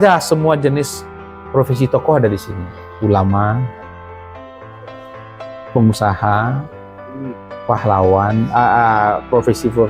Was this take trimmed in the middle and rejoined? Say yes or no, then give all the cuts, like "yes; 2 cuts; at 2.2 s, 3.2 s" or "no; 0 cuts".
no; 0 cuts